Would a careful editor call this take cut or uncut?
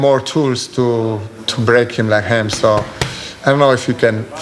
uncut